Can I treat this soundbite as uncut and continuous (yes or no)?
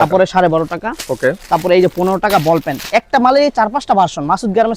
yes